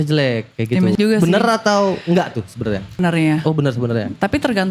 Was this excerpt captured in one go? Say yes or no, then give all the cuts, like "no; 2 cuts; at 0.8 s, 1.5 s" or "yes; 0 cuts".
no; 2 cuts; at 0.9 s, 3.0 s